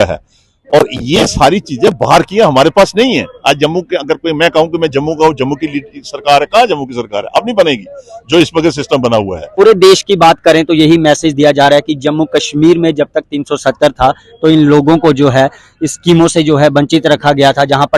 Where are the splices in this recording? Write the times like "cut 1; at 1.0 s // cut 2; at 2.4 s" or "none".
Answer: cut 1; at 9.4 s